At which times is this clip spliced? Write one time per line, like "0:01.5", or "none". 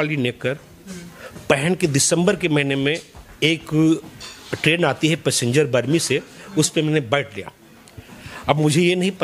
none